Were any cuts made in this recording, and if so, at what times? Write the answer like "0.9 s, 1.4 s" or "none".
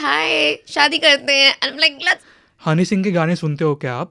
2.2 s

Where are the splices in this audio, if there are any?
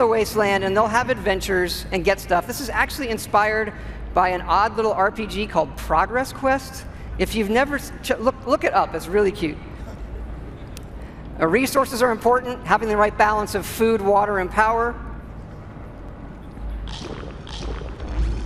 none

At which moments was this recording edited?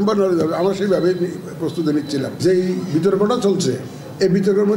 2.4 s

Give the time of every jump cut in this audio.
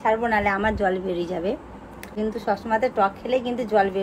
2.1 s

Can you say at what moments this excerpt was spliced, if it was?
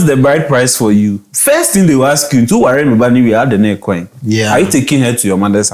none

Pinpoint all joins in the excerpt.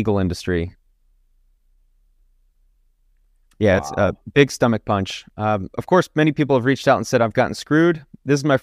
none

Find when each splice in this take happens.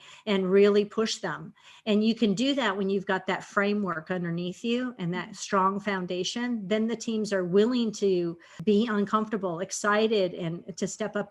8.6 s

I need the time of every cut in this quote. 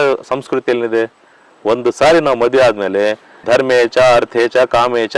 3.3 s

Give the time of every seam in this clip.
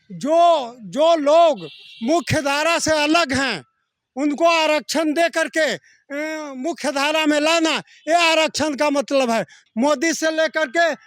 9.6 s

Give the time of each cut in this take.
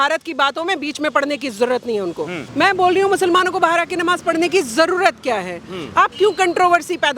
2.4 s

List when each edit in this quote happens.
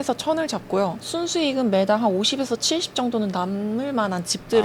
none

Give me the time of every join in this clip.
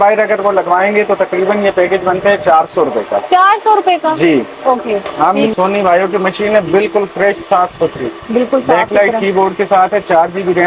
5.5 s

